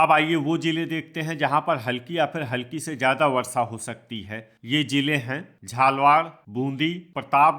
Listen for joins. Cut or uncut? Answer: cut